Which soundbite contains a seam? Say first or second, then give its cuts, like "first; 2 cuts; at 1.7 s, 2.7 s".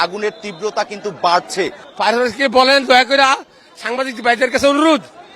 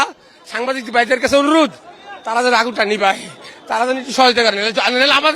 first; 1 cut; at 1.8 s